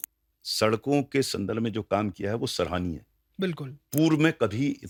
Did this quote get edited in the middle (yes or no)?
no